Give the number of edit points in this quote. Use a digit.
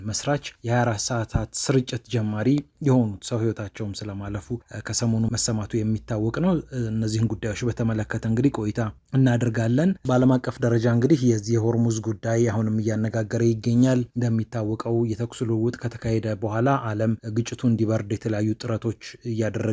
1